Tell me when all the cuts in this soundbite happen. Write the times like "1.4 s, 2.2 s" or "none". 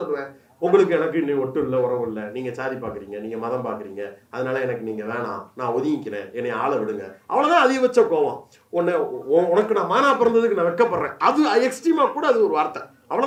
none